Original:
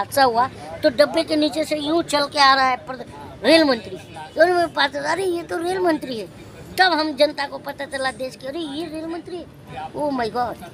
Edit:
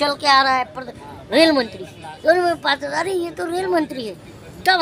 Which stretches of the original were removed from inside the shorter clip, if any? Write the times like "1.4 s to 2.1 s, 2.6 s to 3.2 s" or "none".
none